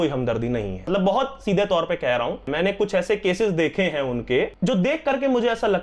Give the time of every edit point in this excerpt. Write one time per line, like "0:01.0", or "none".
0:00.9
0:02.4
0:04.5

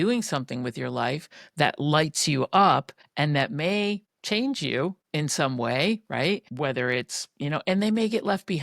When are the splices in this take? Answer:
0:03.0
0:04.1
0:05.0
0:06.5

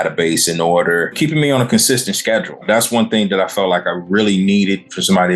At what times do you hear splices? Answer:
0:01.2
0:02.6

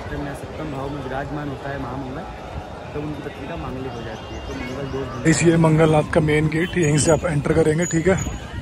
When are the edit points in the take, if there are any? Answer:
0:05.2

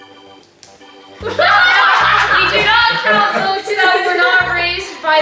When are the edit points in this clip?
none

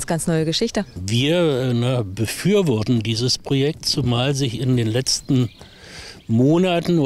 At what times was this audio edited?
none

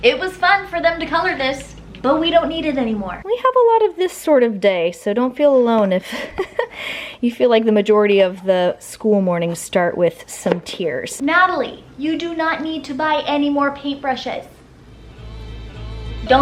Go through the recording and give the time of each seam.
0:03.1
0:11.1

